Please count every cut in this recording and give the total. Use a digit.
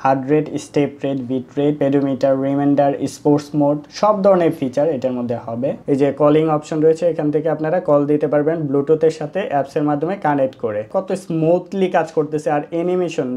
2